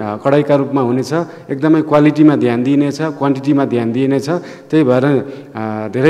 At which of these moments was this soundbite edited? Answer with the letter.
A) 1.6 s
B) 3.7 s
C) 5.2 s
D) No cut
D